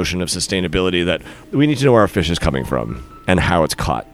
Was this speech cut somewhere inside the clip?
no; 0 cuts

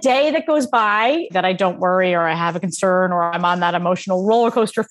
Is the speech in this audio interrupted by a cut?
yes; 1 cut; at 1.3 s

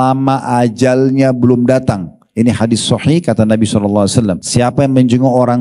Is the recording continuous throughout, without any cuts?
no; 1 cut; at 4.4 s

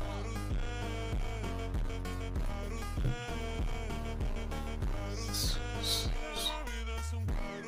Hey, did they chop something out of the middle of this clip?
no; 0 cuts

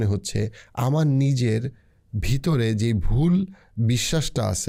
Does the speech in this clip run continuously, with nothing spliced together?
yes; 0 cuts

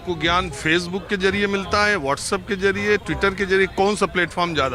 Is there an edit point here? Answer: no; 0 cuts

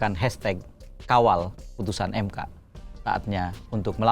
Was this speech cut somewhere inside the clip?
yes; 1 cut; at 3.0 s

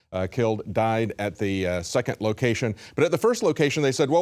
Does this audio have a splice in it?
no; 0 cuts

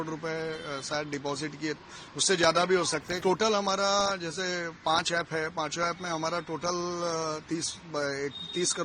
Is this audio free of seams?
no; 1 cut; at 3.2 s

